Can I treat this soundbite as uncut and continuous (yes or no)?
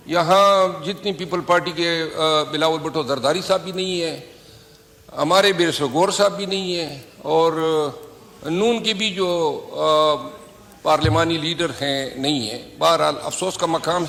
yes